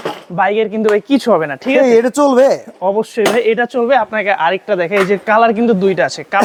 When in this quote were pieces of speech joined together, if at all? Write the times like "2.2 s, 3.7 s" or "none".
none